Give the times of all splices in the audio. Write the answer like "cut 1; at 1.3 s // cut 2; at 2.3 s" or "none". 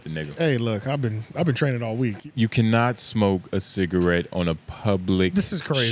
cut 1; at 2.2 s